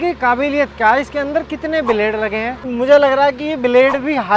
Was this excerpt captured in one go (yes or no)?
no